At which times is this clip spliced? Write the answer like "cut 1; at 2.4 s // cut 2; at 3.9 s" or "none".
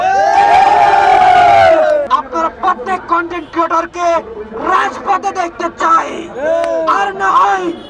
cut 1; at 2.1 s

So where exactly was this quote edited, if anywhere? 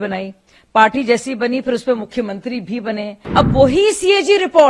cut 1; at 3.2 s

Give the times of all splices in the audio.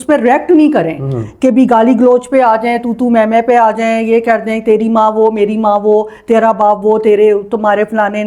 none

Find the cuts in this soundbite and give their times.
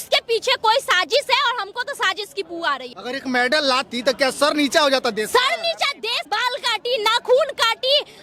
cut 1; at 2.9 s // cut 2; at 6.1 s

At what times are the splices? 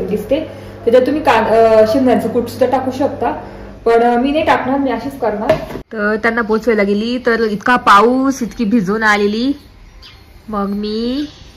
cut 1; at 5.8 s

